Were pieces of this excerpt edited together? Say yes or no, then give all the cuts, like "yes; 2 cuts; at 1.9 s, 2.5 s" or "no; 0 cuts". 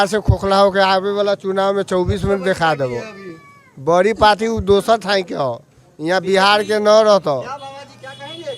no; 0 cuts